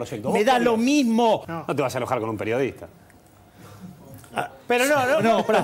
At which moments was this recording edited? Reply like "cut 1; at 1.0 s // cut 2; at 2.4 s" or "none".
cut 1; at 1.5 s